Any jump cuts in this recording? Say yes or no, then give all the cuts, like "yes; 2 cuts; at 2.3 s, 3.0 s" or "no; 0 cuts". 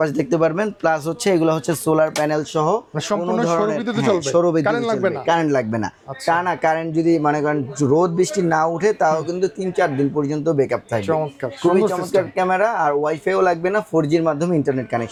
no; 0 cuts